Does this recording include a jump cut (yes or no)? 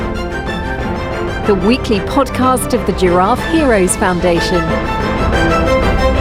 no